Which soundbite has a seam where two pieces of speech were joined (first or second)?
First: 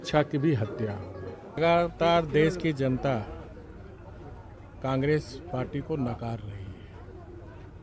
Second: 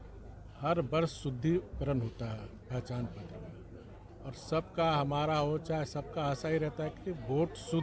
first